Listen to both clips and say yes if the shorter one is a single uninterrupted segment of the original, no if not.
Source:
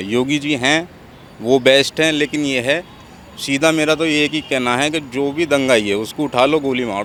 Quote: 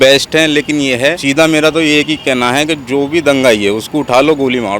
no